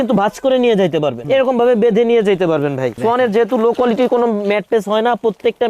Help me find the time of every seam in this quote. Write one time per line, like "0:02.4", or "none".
0:01.2
0:02.9